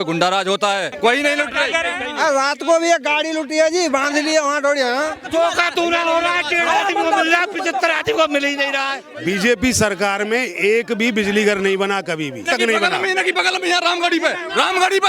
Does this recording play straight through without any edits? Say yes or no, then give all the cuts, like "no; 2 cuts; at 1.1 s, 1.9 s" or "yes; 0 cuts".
no; 4 cuts; at 0.9 s, 5.2 s, 9.1 s, 12.4 s